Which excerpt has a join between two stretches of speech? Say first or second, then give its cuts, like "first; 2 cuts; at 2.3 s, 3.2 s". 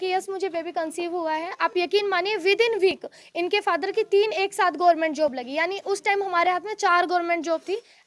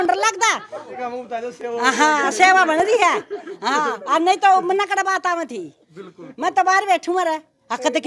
second; 1 cut; at 1.0 s